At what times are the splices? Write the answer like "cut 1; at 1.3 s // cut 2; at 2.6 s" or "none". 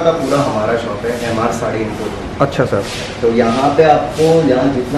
none